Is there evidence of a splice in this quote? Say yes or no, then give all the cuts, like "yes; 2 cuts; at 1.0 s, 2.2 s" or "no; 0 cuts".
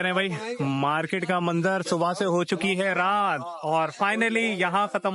no; 0 cuts